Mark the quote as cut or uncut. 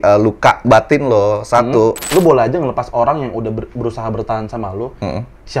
cut